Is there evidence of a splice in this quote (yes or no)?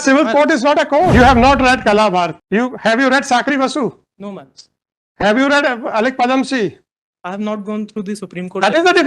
yes